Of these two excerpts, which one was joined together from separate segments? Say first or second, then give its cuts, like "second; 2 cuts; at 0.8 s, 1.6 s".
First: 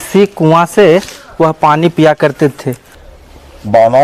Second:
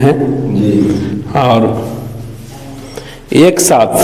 first; 1 cut; at 2.9 s